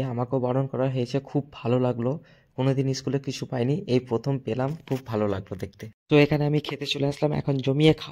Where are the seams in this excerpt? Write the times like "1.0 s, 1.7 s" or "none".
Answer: none